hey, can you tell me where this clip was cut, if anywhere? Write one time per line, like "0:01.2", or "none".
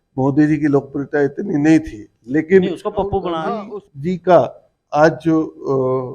0:03.5